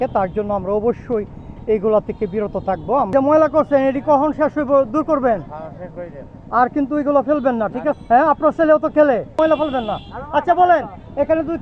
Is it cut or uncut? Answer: cut